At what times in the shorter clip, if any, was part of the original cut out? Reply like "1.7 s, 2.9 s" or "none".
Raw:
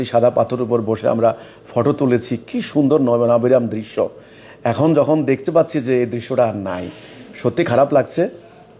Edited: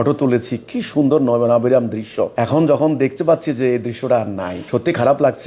2.3 s, 4.5 s